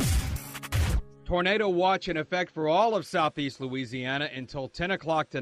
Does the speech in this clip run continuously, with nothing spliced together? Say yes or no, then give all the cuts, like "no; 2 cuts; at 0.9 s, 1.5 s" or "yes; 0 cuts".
no; 1 cut; at 1.2 s